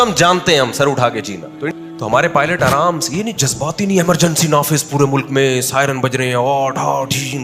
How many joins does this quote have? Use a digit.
1